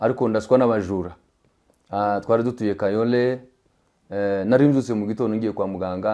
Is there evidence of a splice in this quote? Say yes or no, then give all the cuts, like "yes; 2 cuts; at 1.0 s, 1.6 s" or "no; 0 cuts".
no; 0 cuts